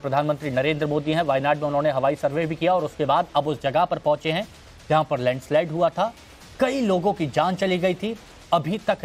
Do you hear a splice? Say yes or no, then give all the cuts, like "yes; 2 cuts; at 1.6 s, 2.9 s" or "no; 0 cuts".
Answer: yes; 1 cut; at 5.9 s